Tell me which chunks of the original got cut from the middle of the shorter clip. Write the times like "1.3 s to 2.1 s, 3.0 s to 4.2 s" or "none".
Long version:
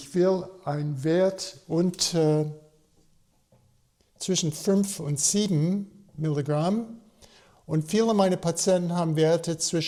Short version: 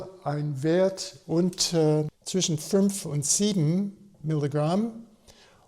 2.6 s to 4.1 s

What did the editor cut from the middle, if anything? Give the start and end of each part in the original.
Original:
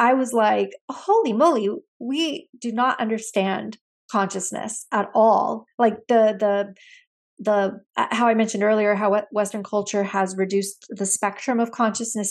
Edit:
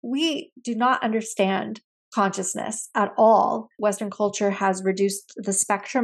5.7 s to 9.3 s

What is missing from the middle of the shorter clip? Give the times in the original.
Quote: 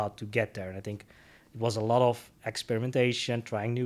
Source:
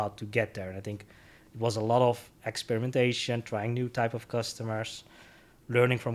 none

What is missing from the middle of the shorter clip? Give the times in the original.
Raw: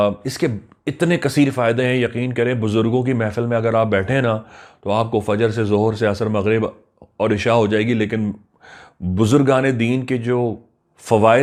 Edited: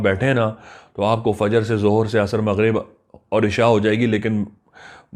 none

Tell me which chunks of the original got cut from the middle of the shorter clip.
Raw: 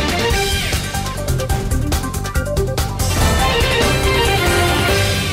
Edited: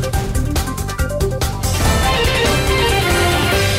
none

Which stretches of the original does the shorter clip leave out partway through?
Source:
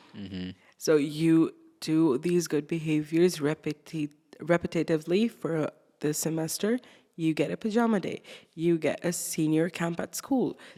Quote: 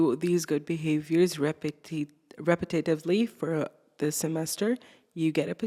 none

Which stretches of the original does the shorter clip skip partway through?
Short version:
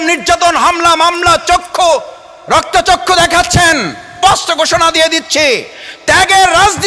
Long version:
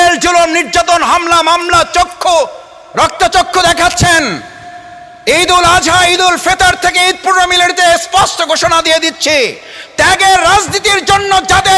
4.6 s to 8.0 s

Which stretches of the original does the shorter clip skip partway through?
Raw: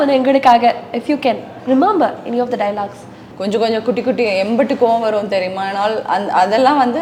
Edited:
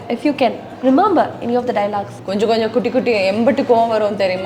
3.0 s to 3.3 s

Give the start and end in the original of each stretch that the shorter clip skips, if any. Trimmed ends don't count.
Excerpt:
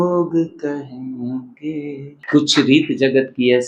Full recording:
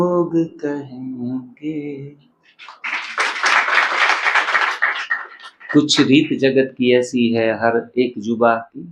2.1 s to 5.5 s

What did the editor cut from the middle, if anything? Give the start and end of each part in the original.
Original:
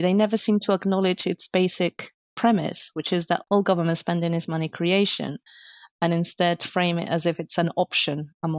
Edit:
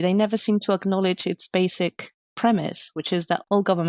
none

